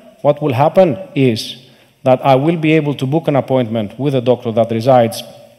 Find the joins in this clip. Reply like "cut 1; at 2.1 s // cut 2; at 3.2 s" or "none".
none